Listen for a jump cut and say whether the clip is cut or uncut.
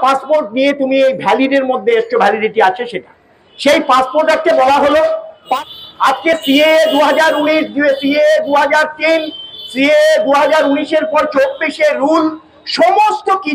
cut